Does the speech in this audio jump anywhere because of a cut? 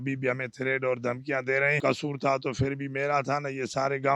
yes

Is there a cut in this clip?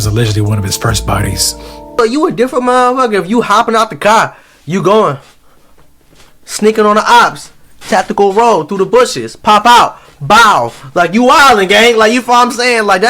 yes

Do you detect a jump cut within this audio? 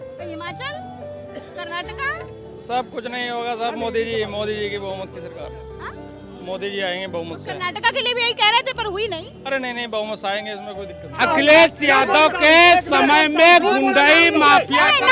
no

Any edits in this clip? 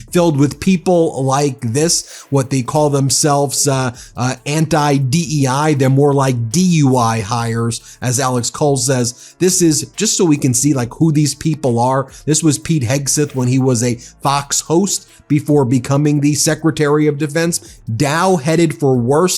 yes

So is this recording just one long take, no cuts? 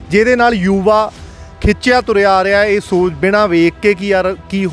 yes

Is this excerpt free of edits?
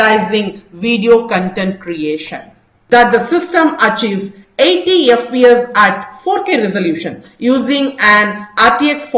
no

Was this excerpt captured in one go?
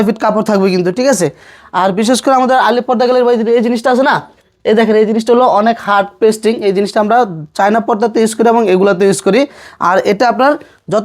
yes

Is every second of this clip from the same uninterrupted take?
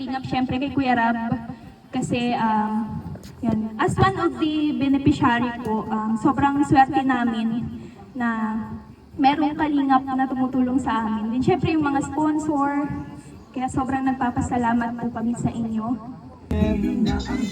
no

